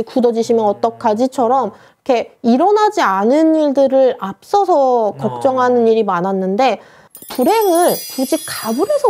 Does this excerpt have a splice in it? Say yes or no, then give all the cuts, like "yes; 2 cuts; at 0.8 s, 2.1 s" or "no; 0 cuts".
no; 0 cuts